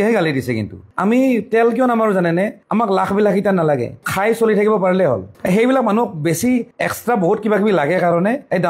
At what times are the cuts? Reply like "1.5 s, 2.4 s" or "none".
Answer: 0.9 s, 4.0 s